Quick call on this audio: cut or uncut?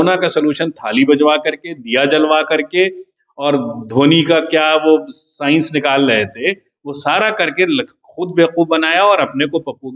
uncut